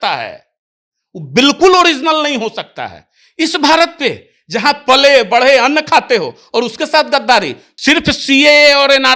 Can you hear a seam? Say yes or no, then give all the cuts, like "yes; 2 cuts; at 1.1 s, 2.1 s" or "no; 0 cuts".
yes; 1 cut; at 7.6 s